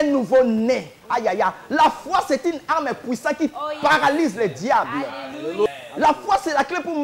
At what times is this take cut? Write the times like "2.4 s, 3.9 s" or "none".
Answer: 5.7 s